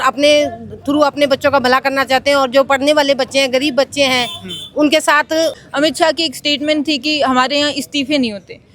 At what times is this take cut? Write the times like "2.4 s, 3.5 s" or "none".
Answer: 5.6 s